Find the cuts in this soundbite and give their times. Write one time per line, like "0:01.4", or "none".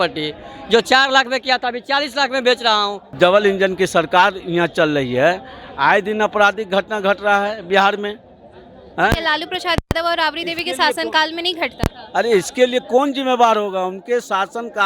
0:03.0